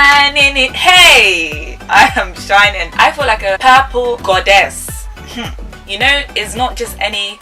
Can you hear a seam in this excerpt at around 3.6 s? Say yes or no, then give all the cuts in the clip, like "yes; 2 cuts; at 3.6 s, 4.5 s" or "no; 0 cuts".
yes; 1 cut; at 3.6 s